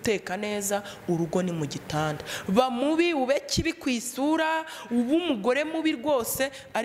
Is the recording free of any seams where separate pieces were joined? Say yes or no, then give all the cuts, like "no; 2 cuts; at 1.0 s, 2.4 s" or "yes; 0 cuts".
yes; 0 cuts